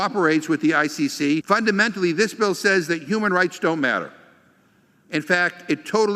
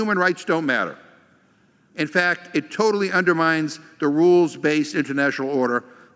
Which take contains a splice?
first; 1 cut; at 1.4 s

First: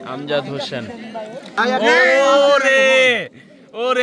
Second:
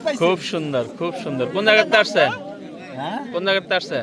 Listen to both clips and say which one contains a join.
first; 1 cut; at 1.6 s

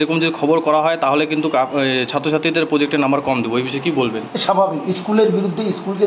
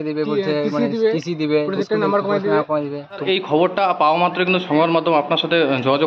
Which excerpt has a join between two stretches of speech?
second; 1 cut; at 3.2 s

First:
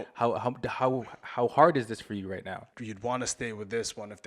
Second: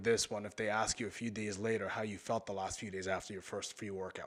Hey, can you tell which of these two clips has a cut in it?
first; 1 cut; at 2.7 s

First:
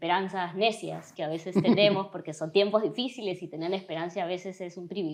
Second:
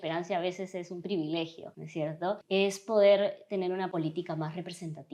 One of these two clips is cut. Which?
second; 2 cuts; at 2.2 s, 3.9 s

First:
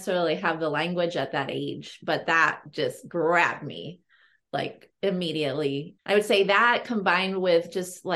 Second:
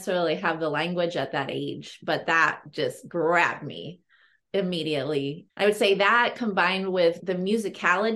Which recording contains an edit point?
second; 2 cuts; at 4.3 s, 7.2 s

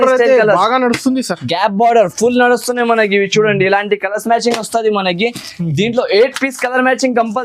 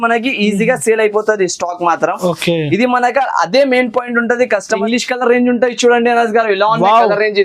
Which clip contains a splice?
second; 1 cut; at 4.7 s

